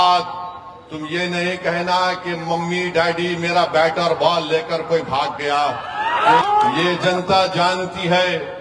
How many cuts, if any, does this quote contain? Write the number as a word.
one